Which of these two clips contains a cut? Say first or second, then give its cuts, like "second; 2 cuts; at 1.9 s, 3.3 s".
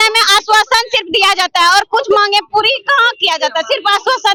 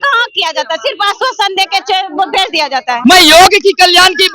second; 1 cut; at 2.9 s